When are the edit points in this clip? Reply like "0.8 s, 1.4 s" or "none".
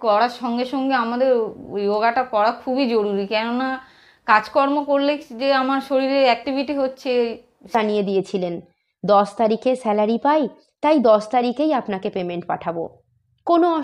7.7 s